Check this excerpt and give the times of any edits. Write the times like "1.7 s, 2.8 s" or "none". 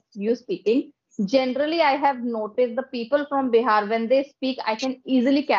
none